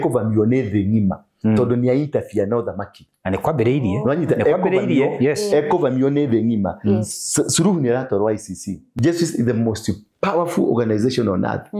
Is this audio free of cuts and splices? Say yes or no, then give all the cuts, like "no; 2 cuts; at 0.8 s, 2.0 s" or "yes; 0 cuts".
no; 1 cut; at 8.8 s